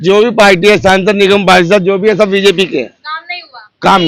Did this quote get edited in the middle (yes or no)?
no